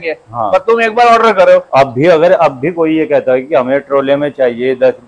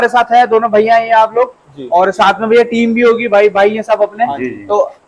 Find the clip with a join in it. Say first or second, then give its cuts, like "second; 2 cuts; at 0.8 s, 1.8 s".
first; 1 cut; at 1.7 s